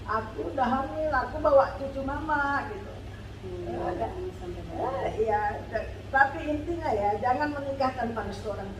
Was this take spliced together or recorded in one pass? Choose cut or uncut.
uncut